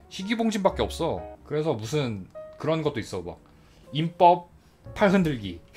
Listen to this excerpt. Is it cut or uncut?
cut